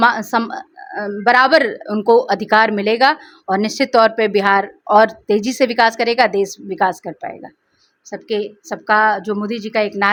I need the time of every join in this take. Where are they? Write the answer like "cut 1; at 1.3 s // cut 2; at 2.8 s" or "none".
none

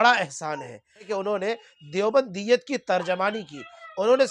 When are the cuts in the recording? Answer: cut 1; at 1.1 s

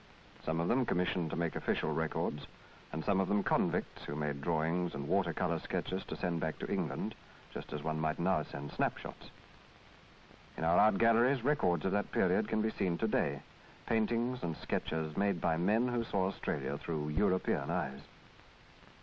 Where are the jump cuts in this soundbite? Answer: cut 1; at 11.8 s

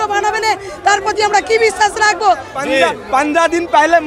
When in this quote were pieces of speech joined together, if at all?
cut 1; at 2.5 s

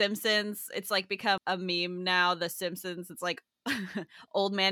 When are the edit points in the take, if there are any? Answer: cut 1; at 1.4 s

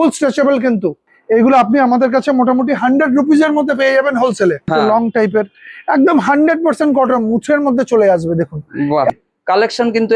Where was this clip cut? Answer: cut 1; at 1.1 s // cut 2; at 4.6 s // cut 3; at 9.1 s

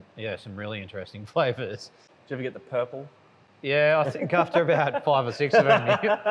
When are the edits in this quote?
cut 1; at 2.1 s

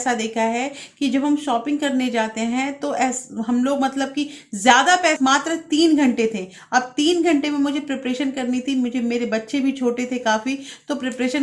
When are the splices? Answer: cut 1; at 5.2 s

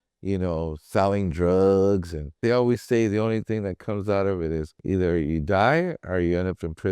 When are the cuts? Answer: cut 1; at 2.4 s // cut 2; at 4.7 s

